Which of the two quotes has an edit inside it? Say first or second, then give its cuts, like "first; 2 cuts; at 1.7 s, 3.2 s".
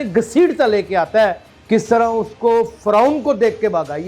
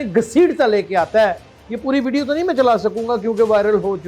first; 1 cut; at 1.5 s